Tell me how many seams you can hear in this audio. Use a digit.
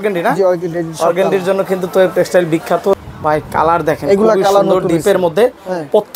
1